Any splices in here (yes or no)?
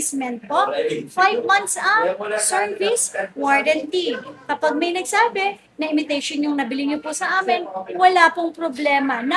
no